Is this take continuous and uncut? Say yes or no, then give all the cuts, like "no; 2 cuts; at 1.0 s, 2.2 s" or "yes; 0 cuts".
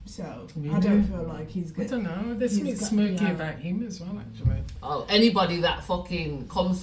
yes; 0 cuts